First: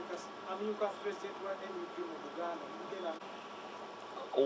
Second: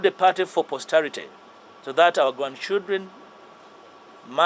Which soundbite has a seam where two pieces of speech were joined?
first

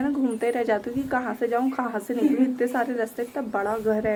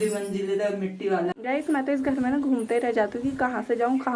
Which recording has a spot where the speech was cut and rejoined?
second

